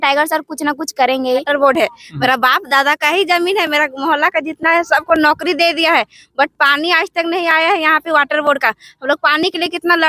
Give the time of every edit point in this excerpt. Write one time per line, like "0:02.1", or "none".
0:01.5